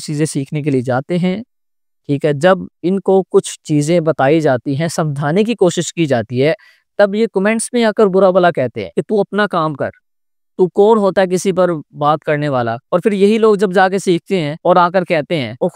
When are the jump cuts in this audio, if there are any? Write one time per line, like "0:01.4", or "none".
none